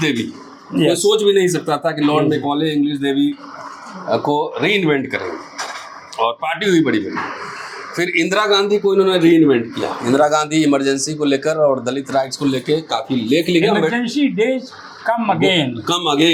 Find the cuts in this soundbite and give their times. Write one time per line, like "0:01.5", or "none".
none